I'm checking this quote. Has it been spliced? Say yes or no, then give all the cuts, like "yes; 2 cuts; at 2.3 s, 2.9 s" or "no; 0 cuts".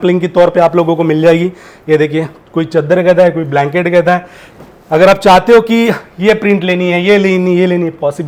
no; 0 cuts